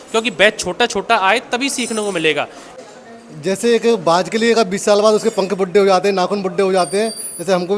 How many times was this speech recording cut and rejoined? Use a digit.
1